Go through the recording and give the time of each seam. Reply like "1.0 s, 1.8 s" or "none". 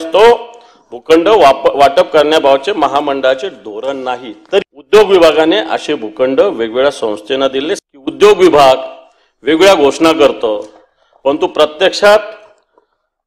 4.8 s, 7.8 s